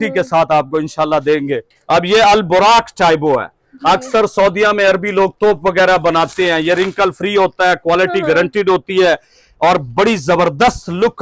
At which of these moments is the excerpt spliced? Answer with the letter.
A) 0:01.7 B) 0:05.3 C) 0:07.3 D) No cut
A